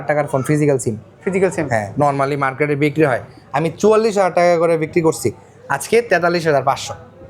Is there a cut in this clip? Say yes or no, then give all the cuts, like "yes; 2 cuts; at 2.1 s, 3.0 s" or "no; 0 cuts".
no; 0 cuts